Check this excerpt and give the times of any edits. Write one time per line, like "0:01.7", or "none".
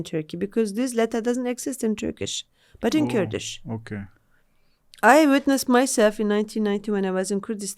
none